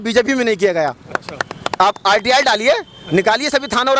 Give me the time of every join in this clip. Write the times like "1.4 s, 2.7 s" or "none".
none